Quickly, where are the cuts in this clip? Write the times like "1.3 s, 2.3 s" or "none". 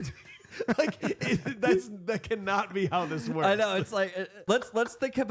4.3 s